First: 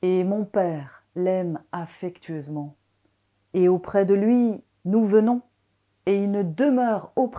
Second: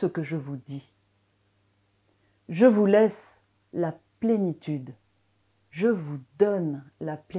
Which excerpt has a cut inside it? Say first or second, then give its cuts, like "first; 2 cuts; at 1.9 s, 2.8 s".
second; 1 cut; at 1.1 s